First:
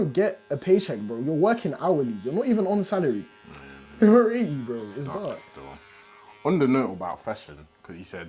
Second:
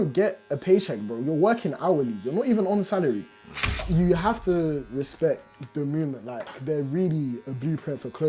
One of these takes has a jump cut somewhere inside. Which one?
second; 1 cut; at 3.8 s

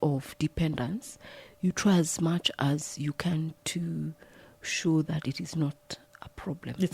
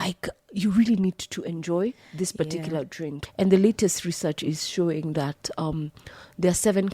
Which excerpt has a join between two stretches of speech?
second; 1 cut; at 3.2 s

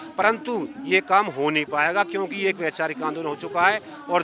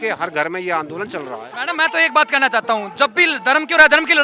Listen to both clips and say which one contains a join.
second; 1 cut; at 1.5 s

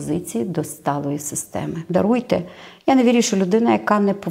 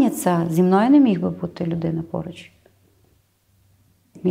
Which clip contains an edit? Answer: first; 1 cut; at 1.8 s

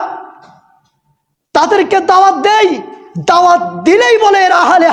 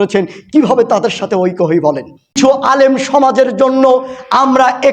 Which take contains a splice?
second; 1 cut; at 2.4 s

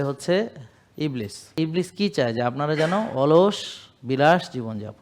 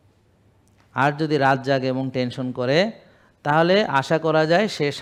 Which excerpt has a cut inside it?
first; 1 cut; at 1.4 s

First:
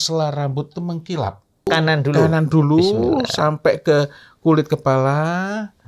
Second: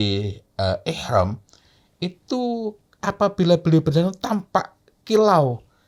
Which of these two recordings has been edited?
first; 1 cut; at 1.7 s

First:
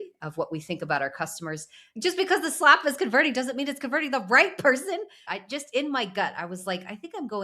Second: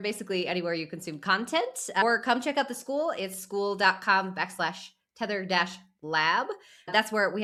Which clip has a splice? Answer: first; 2 cuts; at 1.9 s, 5.2 s

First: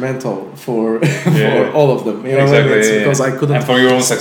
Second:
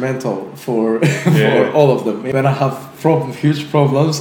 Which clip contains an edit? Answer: second; 1 cut; at 2.2 s

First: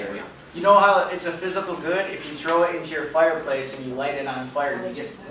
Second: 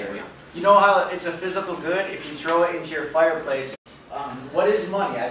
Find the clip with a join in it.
first; 1 cut; at 3.8 s

